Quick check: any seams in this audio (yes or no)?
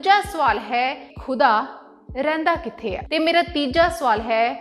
yes